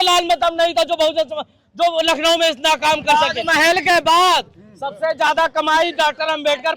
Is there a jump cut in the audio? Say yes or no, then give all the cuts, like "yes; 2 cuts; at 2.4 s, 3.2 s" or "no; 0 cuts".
yes; 1 cut; at 3.0 s